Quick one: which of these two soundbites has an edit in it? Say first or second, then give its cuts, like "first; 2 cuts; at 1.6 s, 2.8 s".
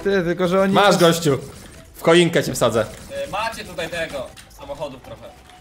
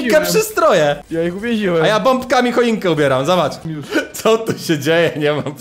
second; 2 cuts; at 1.0 s, 3.6 s